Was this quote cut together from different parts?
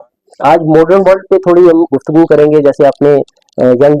no; 0 cuts

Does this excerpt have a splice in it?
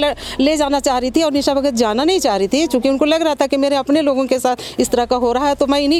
no; 0 cuts

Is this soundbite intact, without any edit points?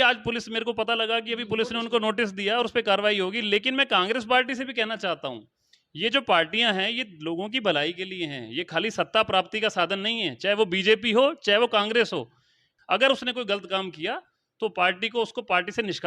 no; 1 cut; at 12.5 s

